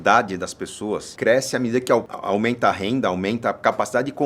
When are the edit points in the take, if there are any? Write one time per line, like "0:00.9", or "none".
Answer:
0:01.1
0:02.1